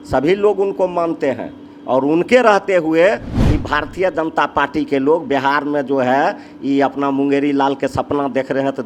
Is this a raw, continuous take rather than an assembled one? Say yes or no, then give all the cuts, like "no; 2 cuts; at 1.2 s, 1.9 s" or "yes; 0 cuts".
yes; 0 cuts